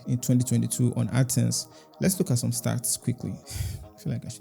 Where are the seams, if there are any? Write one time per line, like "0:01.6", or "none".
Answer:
0:03.4